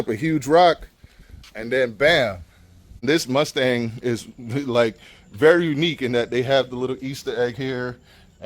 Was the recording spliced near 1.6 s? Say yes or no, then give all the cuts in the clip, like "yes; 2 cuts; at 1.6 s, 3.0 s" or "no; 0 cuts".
no; 1 cut; at 3.0 s